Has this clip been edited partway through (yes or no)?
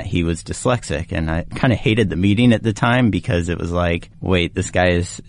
yes